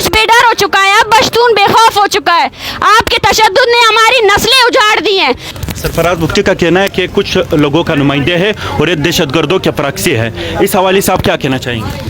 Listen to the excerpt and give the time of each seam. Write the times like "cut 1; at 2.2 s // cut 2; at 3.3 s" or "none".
cut 1; at 5.5 s